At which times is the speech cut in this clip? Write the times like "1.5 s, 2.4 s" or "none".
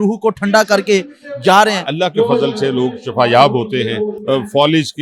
1.9 s, 4.2 s